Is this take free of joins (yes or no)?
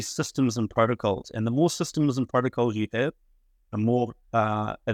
yes